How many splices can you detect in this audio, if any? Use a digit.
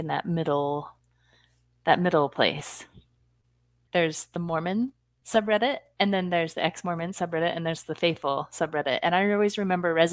1